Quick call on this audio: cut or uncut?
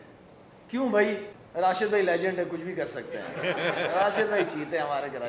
cut